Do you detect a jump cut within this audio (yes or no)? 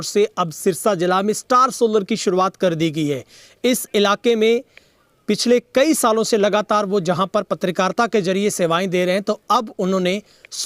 no